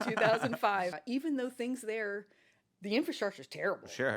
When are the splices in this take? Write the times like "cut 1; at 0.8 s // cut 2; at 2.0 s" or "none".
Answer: cut 1; at 1.0 s